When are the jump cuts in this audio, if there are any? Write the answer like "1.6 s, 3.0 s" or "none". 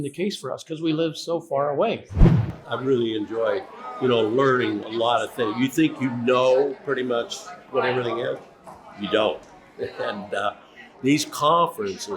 2.4 s, 3.7 s